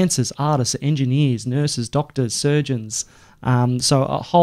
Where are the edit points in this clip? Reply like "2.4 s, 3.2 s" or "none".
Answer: none